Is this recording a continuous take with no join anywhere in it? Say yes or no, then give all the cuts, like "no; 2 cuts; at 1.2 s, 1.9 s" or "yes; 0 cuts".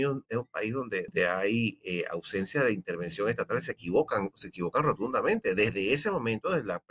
no; 1 cut; at 1.1 s